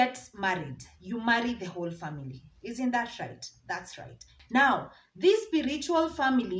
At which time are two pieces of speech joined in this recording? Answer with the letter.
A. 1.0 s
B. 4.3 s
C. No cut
B